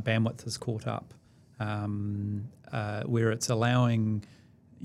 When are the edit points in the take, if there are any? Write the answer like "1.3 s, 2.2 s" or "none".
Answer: none